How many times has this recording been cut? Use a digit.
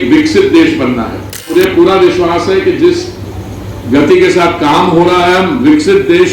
1